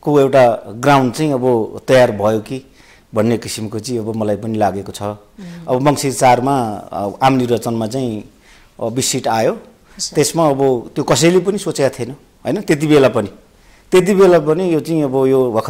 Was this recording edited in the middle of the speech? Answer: no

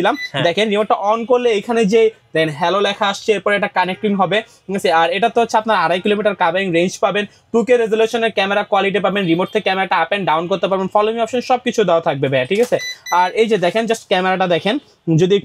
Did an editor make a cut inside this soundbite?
no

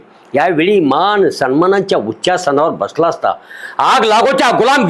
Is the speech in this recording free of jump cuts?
yes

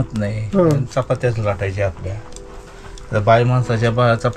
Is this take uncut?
yes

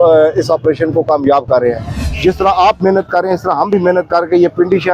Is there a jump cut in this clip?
yes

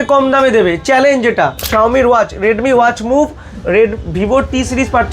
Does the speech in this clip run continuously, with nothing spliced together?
no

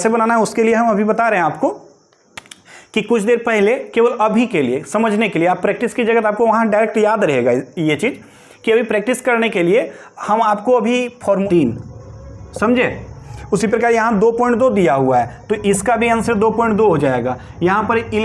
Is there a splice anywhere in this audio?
yes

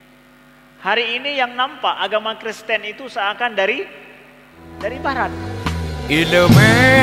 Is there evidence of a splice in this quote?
yes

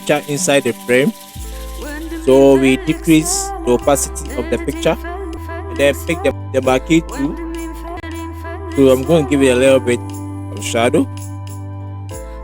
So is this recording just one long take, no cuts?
no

